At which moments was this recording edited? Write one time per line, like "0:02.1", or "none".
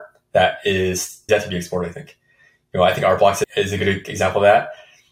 0:01.2
0:03.5